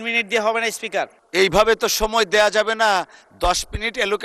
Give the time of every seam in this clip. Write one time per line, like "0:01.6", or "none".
0:01.2